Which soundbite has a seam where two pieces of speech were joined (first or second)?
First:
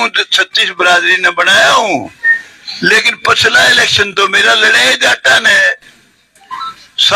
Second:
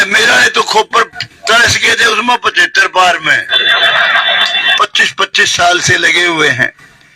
second